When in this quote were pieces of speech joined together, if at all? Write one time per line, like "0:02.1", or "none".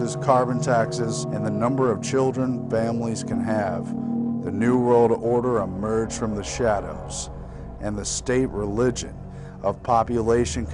none